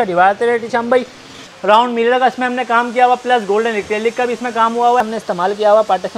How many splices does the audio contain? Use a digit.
2